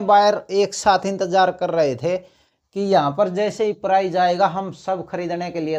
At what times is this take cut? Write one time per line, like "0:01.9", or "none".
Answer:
none